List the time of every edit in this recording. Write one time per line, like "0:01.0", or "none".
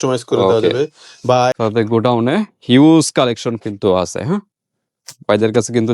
0:01.3